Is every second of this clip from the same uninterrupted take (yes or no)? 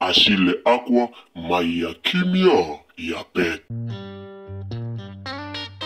no